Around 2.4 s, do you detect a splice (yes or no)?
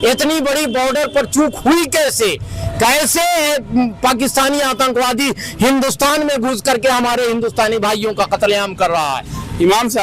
no